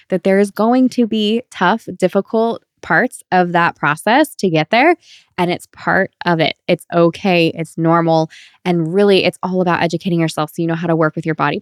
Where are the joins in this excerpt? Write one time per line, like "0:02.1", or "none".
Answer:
none